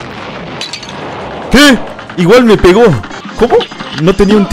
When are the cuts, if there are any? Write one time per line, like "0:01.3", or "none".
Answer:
0:02.0

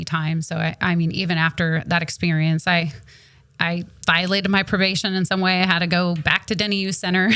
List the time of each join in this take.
none

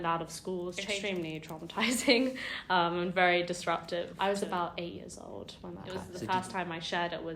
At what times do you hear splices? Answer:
0:00.8
0:04.1
0:06.1

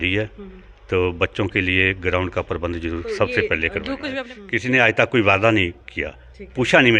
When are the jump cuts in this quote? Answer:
0:04.1

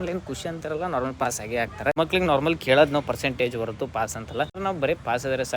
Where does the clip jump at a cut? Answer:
0:01.9
0:04.6

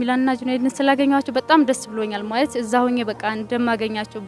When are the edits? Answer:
none

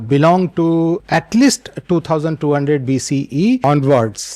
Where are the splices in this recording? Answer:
0:01.0
0:03.6

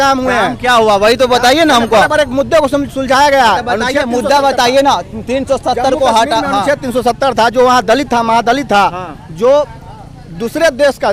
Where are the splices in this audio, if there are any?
none

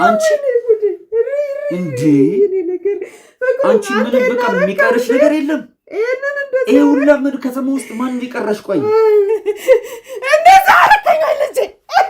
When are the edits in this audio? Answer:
0:09.3

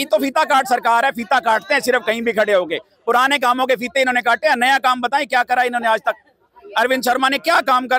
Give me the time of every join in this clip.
none

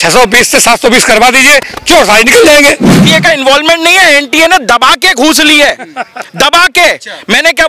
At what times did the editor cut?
0:03.0

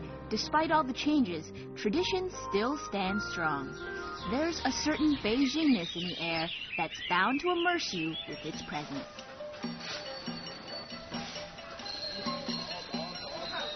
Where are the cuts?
0:04.2

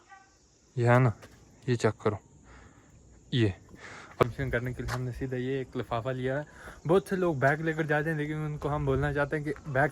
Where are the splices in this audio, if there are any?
0:04.2

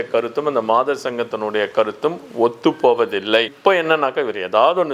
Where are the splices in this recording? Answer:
0:03.5

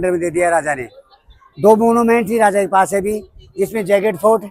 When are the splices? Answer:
none

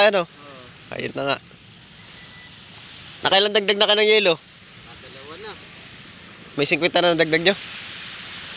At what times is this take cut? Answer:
none

